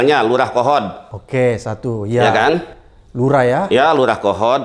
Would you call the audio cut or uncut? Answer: uncut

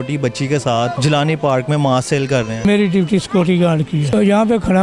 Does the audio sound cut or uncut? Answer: cut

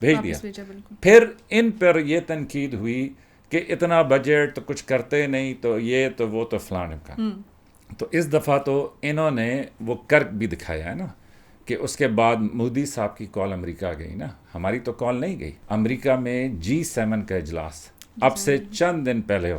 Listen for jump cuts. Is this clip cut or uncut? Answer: cut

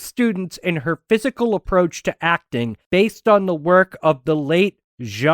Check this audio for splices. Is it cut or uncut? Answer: cut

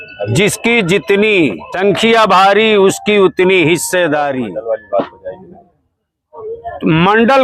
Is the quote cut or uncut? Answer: cut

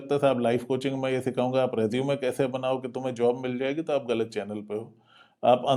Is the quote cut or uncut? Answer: uncut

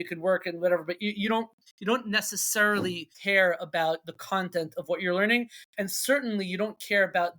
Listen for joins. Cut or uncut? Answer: cut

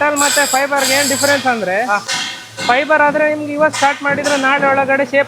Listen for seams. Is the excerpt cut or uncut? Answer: uncut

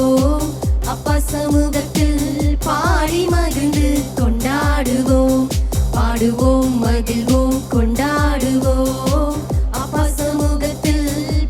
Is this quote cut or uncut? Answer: uncut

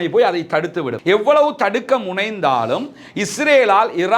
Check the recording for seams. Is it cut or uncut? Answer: cut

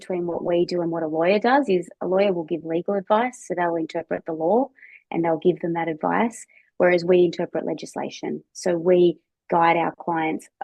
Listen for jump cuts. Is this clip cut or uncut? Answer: uncut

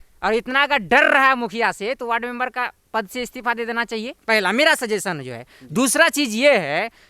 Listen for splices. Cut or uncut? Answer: uncut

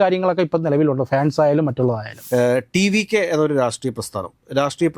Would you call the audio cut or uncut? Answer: cut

